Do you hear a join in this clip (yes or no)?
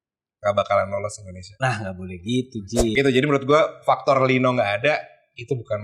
yes